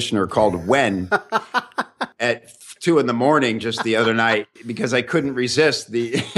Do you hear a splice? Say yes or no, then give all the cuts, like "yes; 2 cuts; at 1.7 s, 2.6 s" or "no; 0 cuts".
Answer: yes; 2 cuts; at 2.0 s, 4.6 s